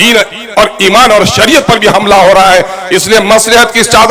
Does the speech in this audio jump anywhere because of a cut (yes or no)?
no